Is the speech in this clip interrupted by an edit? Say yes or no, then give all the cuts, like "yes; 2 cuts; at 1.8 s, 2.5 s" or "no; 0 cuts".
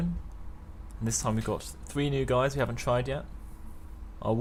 no; 0 cuts